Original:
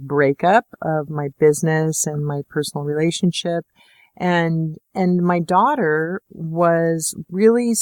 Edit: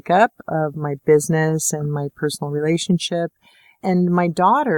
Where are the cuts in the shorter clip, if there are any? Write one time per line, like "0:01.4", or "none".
0:03.7